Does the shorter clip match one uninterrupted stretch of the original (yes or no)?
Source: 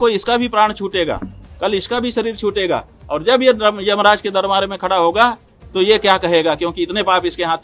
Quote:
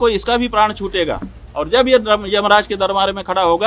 no